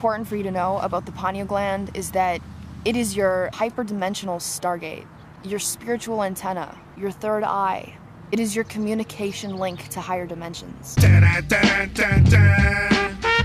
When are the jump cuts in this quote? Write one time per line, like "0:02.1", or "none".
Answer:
0:10.8